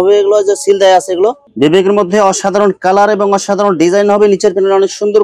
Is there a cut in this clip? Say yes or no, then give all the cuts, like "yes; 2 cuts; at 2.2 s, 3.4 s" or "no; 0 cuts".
yes; 1 cut; at 1.4 s